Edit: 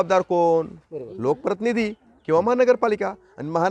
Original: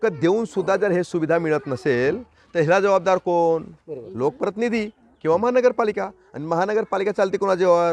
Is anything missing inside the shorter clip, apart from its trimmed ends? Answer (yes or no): no